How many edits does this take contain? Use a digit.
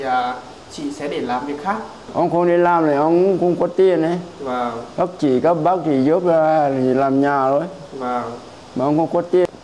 1